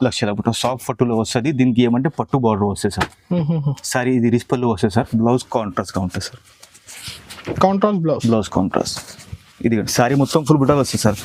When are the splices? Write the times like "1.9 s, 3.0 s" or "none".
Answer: none